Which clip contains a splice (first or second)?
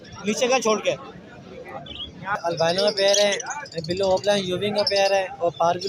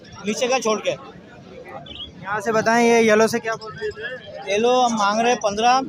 first